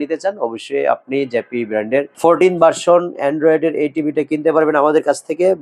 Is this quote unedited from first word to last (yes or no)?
yes